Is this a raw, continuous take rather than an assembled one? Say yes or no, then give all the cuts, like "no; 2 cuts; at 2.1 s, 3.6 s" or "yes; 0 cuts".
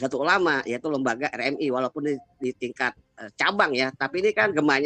yes; 0 cuts